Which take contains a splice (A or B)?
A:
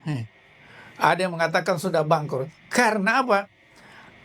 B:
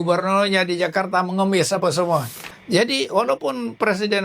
B